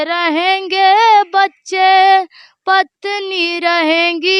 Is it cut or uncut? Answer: uncut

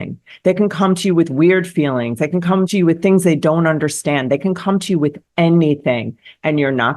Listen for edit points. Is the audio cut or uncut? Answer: cut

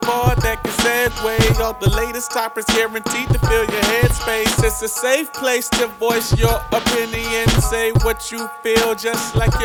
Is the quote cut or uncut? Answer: uncut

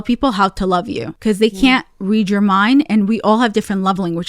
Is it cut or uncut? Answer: cut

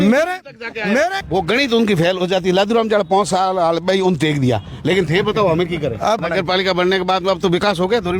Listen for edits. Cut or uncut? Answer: cut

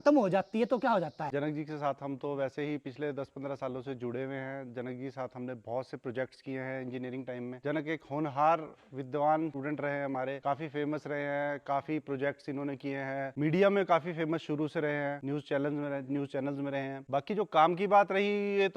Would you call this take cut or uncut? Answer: cut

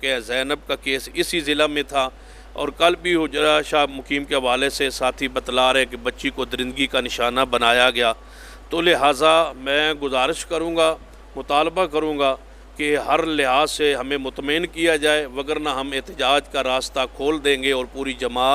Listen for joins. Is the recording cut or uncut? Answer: uncut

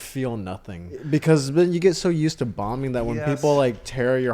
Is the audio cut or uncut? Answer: cut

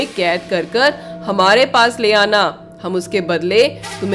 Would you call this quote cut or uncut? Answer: uncut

